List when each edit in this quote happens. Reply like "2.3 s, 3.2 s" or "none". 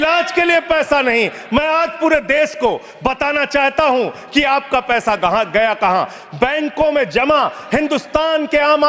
none